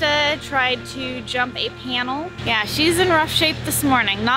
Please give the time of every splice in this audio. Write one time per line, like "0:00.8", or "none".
0:02.3